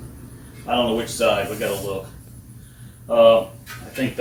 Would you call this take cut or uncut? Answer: uncut